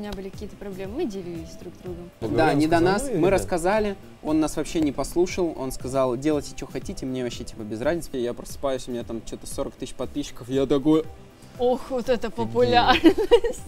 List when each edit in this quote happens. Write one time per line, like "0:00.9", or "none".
0:02.2
0:08.1